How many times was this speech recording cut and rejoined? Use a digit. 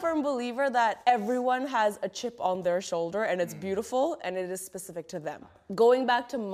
2